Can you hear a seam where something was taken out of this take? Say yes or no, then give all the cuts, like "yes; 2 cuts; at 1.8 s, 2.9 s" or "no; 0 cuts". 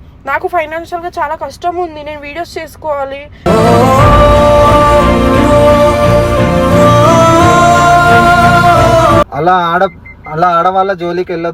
yes; 1 cut; at 9.3 s